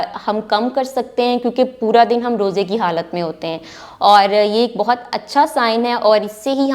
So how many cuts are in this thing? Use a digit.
0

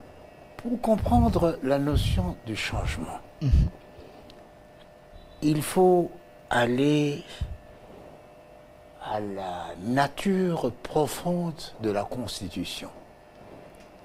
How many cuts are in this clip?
0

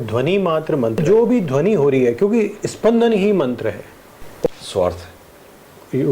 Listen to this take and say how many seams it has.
2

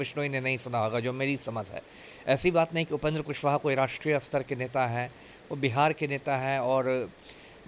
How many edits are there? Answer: 0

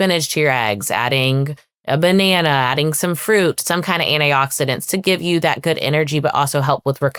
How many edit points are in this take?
0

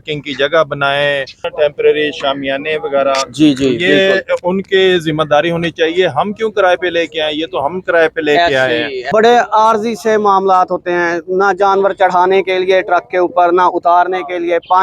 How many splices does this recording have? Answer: 2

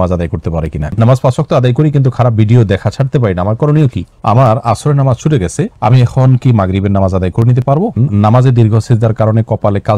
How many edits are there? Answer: 3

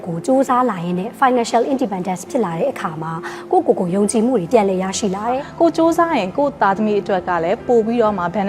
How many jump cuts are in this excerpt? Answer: 1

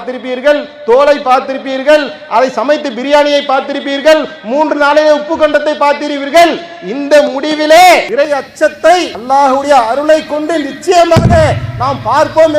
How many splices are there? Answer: 2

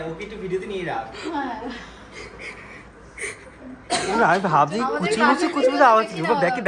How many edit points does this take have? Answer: 0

